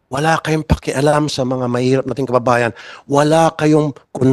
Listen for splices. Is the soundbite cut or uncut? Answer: uncut